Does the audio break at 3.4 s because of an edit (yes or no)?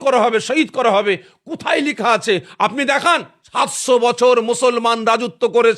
yes